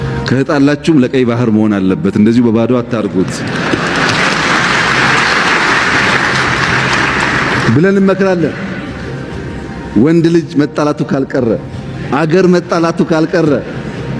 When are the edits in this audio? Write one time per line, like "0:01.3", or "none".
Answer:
none